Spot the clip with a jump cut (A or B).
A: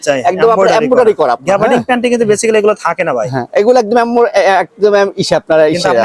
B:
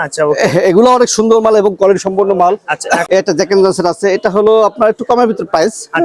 B